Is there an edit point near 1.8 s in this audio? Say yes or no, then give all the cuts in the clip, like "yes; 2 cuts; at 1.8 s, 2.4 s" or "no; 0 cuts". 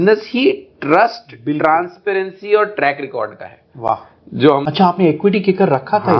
no; 1 cut; at 4.6 s